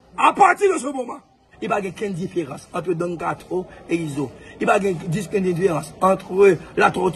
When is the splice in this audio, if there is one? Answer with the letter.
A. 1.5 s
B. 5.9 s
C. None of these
A